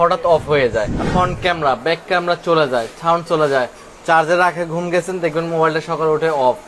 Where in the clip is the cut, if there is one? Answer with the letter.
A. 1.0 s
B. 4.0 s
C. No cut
A